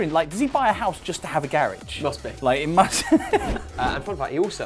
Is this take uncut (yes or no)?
no